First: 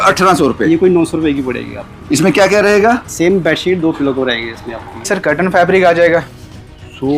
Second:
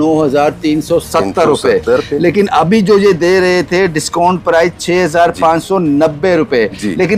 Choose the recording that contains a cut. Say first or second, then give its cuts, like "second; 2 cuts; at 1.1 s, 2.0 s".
first; 1 cut; at 5.1 s